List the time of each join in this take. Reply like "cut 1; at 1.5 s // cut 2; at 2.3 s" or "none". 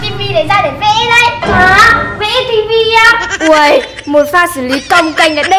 cut 1; at 3.3 s

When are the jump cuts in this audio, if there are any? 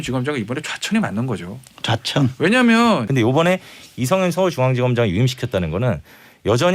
cut 1; at 3.1 s

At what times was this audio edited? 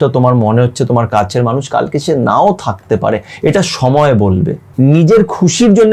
cut 1; at 4.6 s

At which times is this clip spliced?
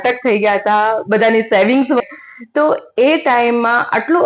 cut 1; at 2.0 s

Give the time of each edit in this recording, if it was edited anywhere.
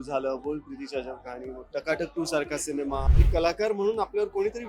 cut 1; at 3.1 s

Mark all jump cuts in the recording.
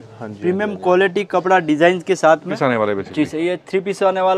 cut 1; at 2.5 s

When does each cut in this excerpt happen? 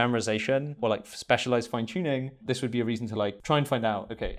cut 1; at 0.8 s // cut 2; at 2.4 s // cut 3; at 3.4 s

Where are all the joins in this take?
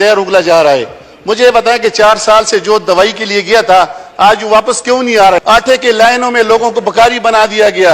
cut 1; at 5.4 s

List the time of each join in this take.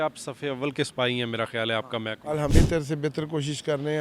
cut 1; at 2.5 s

